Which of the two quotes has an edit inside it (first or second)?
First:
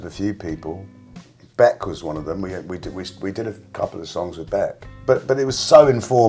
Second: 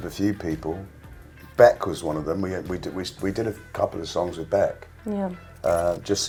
first